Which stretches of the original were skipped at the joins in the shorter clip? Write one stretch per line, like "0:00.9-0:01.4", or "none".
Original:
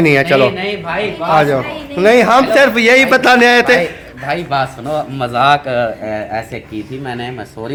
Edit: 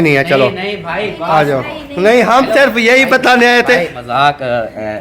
0:04.0-0:05.2